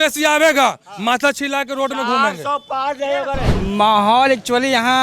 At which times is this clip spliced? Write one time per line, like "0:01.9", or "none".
0:03.5

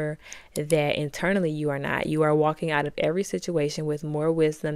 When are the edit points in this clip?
none

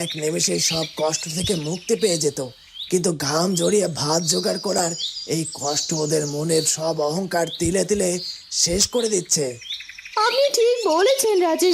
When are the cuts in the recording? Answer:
none

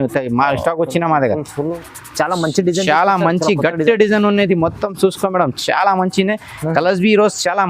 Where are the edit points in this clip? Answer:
0:01.8

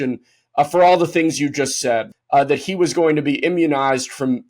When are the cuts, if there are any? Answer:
0:02.1

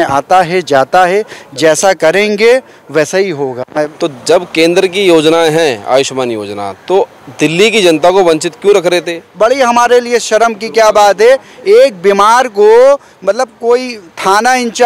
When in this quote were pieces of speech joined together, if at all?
0:03.8
0:09.2

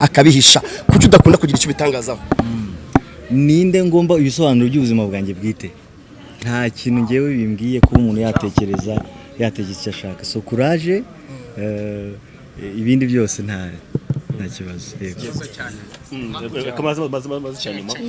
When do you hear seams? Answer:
none

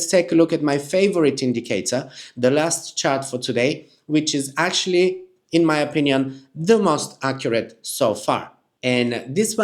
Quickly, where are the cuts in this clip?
none

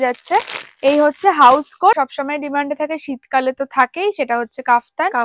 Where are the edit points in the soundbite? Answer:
0:02.0

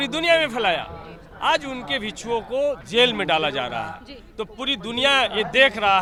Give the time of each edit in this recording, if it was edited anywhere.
none

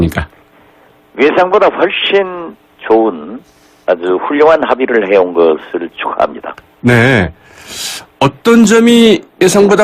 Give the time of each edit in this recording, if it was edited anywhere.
0:07.4

